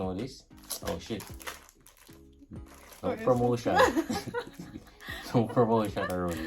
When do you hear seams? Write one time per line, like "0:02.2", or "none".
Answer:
none